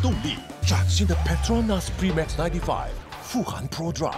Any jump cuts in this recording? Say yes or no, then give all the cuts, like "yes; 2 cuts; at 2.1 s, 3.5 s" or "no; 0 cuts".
no; 0 cuts